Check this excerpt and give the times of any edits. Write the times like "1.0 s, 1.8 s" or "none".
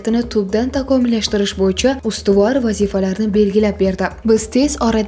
4.1 s